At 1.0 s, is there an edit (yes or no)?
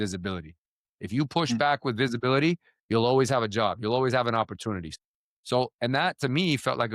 no